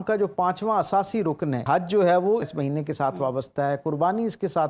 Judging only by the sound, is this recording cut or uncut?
cut